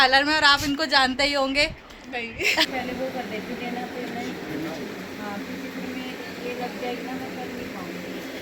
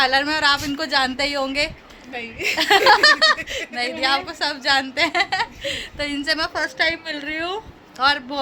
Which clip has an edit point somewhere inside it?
first; 1 cut; at 2.7 s

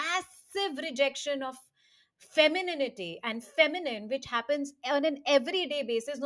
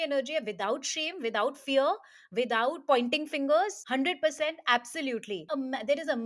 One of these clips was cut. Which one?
second; 2 cuts; at 3.8 s, 5.4 s

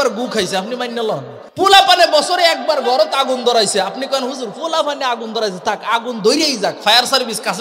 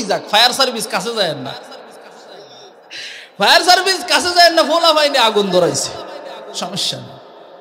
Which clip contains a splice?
first; 1 cut; at 1.4 s

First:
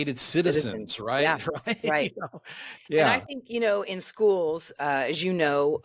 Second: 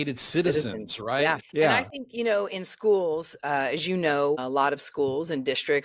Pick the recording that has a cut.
second; 2 cuts; at 1.4 s, 4.4 s

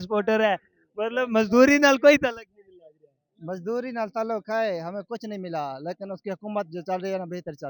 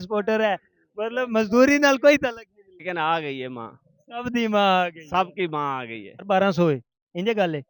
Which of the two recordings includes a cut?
second; 2 cuts; at 2.8 s, 6.1 s

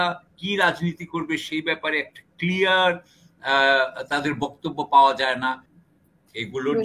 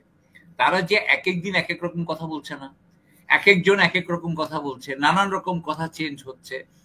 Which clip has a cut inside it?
first; 1 cut; at 5.7 s

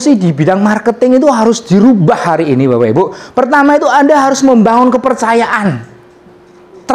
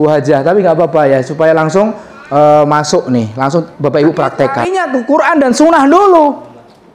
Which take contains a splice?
second; 1 cut; at 4.8 s

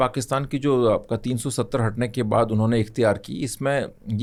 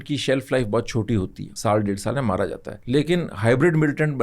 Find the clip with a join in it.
second; 2 cuts; at 1.4 s, 2.7 s

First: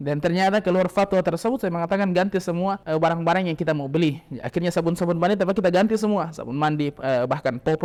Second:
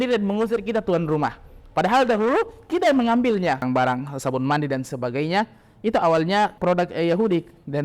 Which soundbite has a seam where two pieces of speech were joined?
second; 1 cut; at 3.6 s

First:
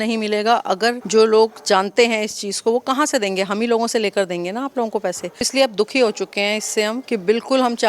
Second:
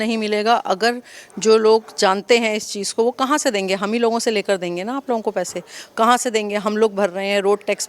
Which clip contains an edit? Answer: first; 3 cuts; at 1.0 s, 5.5 s, 7.0 s

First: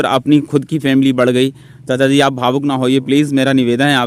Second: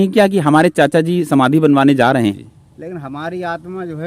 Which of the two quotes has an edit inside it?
second; 1 cut; at 2.1 s

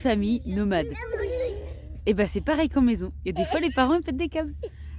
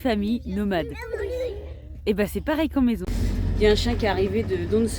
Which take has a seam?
second; 1 cut; at 3.1 s

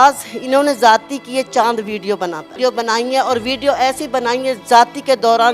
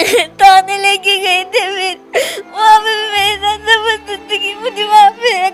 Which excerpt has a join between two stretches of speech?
first; 1 cut; at 2.5 s

